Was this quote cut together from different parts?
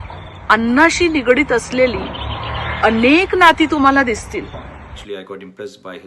yes; 1 cut; at 5.0 s

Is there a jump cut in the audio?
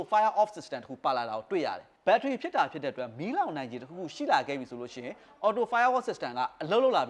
yes; 1 cut; at 1.9 s

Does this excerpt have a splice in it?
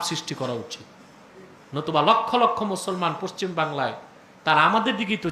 no; 0 cuts

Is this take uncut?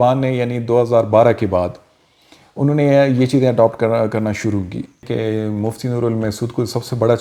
no; 1 cut; at 5.0 s

